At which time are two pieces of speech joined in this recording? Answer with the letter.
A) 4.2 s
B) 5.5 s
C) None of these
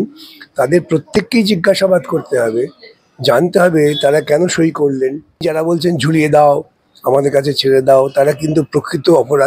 B